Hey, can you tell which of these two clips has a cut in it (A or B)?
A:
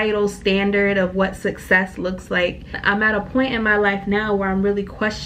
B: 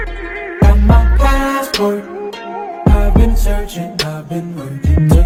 A